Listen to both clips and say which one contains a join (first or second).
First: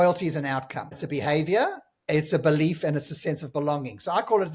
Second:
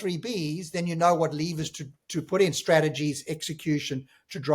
first